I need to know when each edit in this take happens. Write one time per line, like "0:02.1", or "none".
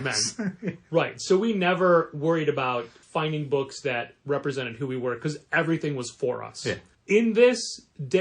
0:03.0
0:06.9